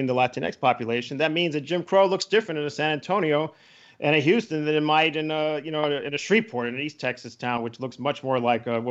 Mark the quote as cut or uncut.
uncut